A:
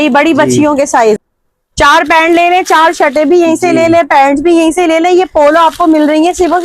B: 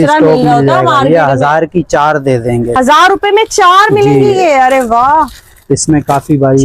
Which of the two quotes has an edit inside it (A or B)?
A